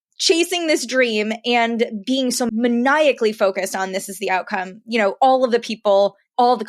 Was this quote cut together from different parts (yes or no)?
yes